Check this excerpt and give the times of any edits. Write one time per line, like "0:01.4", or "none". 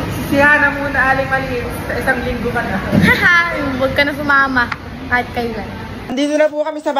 0:05.9